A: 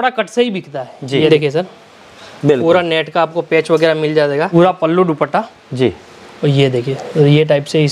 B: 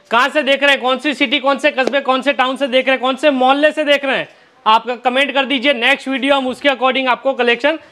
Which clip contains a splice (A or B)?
A